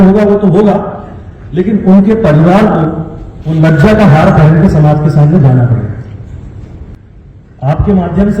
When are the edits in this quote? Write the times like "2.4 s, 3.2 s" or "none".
7.0 s